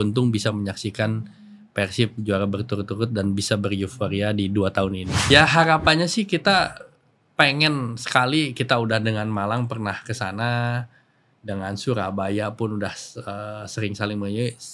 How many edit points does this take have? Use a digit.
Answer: 1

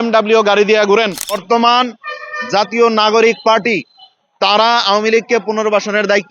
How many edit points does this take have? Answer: 1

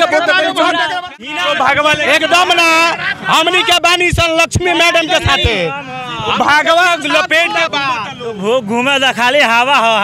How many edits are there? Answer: 1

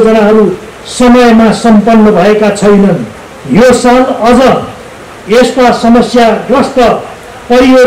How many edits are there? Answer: 0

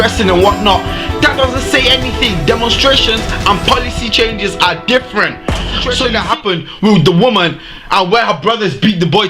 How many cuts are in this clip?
1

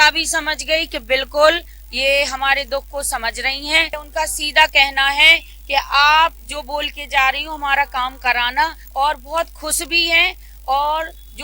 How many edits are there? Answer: 2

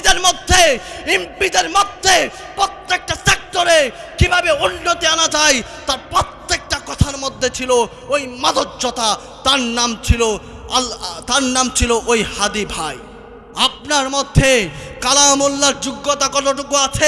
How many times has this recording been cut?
1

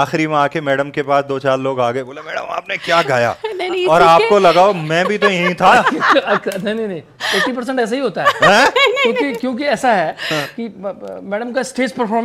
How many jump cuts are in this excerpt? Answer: 0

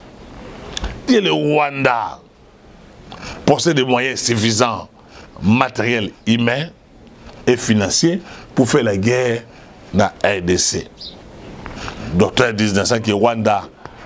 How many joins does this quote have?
1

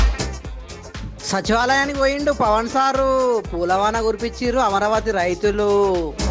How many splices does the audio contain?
0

